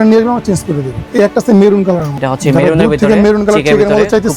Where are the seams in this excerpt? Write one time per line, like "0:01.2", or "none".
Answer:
none